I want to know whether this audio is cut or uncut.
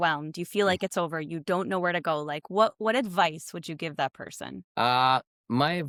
uncut